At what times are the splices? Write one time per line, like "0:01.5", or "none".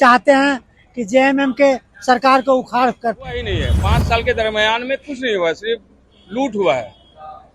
0:03.6